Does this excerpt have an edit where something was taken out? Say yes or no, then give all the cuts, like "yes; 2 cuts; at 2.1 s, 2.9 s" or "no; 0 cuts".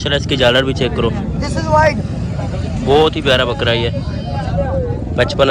no; 0 cuts